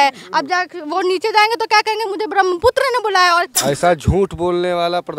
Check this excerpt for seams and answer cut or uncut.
cut